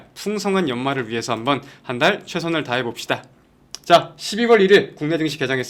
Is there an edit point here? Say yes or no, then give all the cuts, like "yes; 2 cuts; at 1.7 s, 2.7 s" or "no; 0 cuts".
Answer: no; 0 cuts